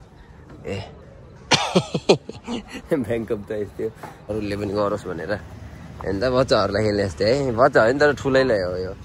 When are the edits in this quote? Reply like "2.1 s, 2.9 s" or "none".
4.2 s